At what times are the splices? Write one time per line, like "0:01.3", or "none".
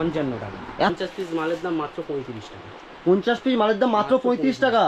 0:00.9